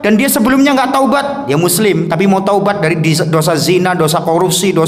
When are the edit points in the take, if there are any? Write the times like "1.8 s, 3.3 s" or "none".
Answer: none